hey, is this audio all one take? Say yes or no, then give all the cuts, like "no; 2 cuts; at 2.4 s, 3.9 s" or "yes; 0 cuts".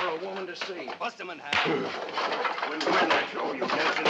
no; 2 cuts; at 1.0 s, 2.1 s